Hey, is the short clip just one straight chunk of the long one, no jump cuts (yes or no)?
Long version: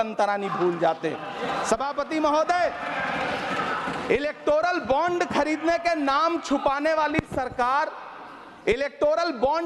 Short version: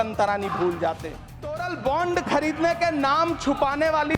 no